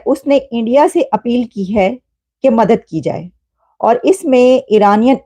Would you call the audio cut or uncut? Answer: uncut